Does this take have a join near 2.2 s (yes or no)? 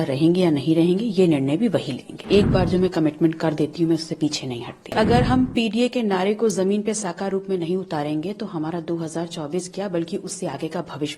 yes